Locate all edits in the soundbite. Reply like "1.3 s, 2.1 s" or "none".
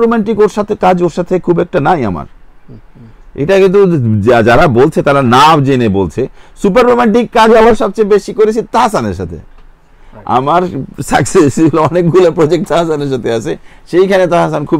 none